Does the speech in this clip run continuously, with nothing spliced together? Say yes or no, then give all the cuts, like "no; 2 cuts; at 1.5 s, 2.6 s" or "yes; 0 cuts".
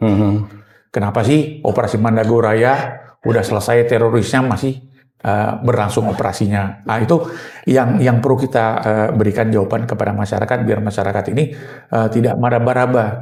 yes; 0 cuts